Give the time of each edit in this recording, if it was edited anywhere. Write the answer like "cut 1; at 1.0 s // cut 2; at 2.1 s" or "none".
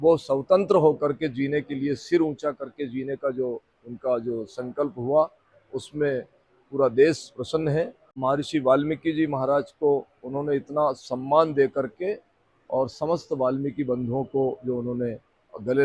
cut 1; at 8.1 s